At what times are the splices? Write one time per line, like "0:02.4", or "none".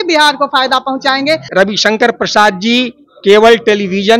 0:01.5